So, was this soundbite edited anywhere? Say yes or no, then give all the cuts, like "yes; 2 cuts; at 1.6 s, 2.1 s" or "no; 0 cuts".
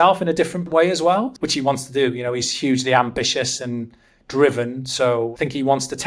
yes; 2 cuts; at 1.0 s, 5.3 s